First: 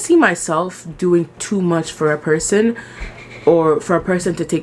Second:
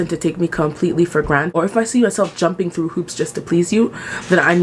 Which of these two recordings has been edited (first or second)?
second